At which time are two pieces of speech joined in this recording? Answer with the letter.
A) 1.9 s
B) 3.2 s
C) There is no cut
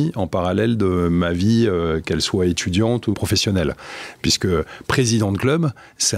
B